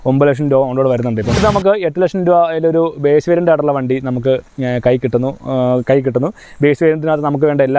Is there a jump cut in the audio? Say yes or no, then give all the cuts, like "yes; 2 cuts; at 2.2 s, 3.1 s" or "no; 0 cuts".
yes; 1 cut; at 1.4 s